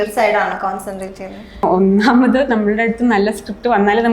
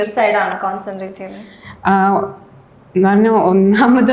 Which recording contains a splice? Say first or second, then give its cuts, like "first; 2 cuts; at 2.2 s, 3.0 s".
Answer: first; 1 cut; at 1.6 s